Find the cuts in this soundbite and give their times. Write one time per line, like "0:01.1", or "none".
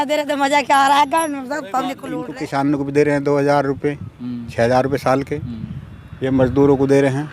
0:02.0